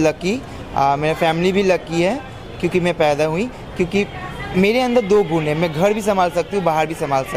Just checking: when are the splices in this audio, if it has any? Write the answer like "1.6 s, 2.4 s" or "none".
none